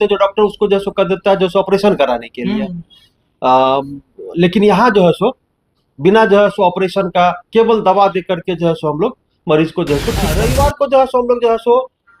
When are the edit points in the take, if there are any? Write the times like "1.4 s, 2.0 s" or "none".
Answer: 10.4 s